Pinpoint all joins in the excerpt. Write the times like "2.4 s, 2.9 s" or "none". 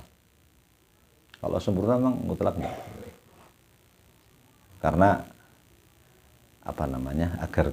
4.7 s

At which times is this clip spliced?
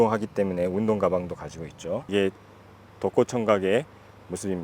2.0 s

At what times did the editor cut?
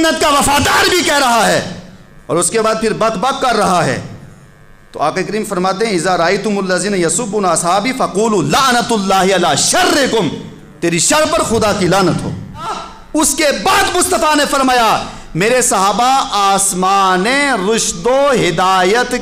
12.9 s

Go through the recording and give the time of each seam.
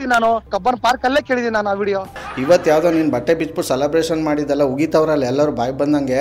2.2 s

